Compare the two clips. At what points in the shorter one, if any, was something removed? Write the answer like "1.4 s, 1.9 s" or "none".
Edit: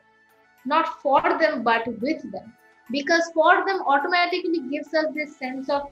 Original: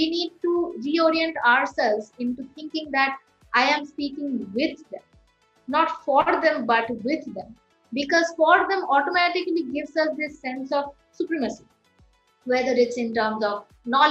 none